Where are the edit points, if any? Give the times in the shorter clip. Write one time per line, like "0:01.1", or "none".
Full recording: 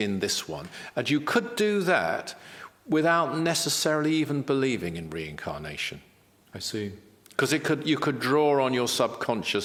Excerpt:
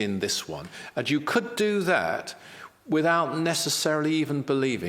none